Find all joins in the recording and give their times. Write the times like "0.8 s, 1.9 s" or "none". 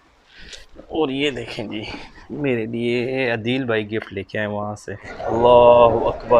5.1 s